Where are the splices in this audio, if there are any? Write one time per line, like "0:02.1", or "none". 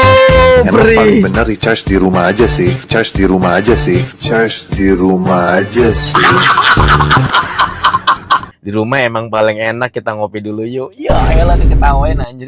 0:08.5